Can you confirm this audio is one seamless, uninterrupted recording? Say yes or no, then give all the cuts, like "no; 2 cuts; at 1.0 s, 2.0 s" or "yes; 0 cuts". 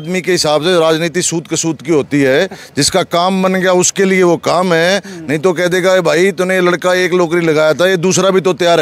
yes; 0 cuts